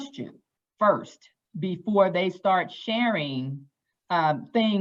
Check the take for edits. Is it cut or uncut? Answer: uncut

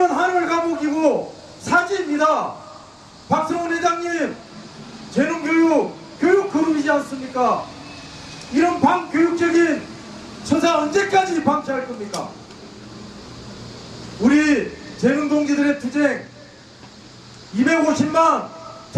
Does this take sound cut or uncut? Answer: uncut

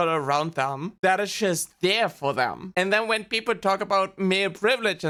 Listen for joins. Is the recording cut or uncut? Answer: uncut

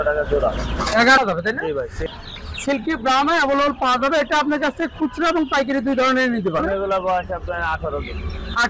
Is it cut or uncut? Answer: cut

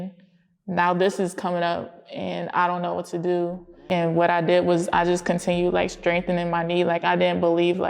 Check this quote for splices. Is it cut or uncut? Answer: cut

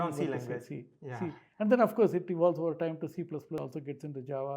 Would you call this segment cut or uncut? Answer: cut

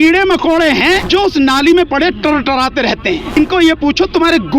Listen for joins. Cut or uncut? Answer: cut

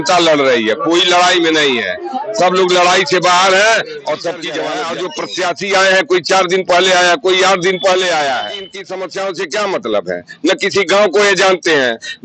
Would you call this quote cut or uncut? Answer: cut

